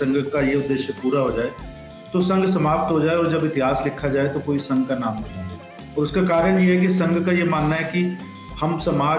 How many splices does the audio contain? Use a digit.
0